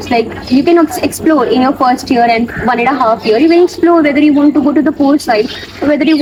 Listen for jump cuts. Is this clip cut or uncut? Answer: uncut